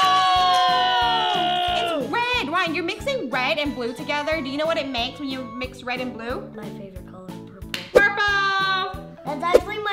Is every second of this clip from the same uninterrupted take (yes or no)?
yes